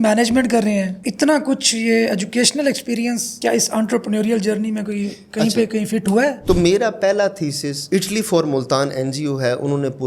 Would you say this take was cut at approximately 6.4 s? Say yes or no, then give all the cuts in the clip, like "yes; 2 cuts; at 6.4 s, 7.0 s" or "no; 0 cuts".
yes; 1 cut; at 6.4 s